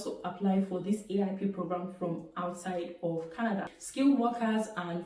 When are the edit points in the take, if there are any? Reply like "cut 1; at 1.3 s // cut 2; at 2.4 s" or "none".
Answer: cut 1; at 3.7 s